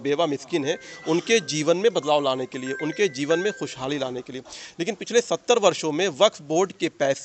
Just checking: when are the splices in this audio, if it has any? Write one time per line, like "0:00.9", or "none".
none